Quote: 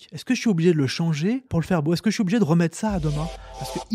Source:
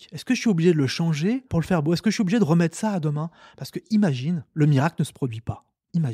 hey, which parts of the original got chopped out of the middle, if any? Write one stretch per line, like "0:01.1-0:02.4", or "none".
none